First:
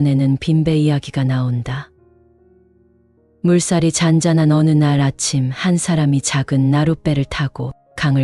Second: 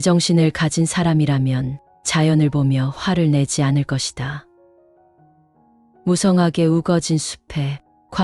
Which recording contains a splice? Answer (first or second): first